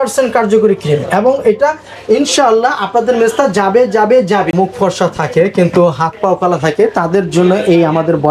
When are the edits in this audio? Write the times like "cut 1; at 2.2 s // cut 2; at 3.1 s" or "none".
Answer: cut 1; at 4.5 s